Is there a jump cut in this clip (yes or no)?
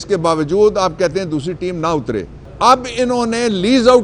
yes